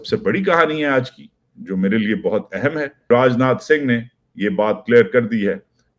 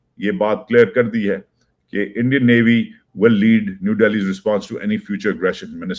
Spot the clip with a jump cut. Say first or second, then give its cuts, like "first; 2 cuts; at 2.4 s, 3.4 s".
first; 1 cut; at 3.1 s